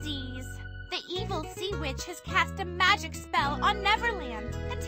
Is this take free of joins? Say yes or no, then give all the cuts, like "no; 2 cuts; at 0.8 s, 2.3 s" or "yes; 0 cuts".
yes; 0 cuts